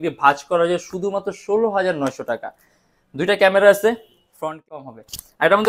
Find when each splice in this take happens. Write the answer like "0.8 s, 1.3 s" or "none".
4.8 s